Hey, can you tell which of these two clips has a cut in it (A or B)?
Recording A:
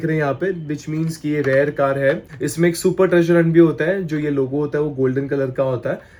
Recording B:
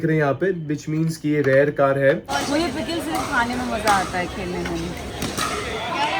B